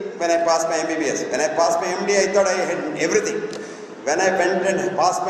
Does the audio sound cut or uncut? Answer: uncut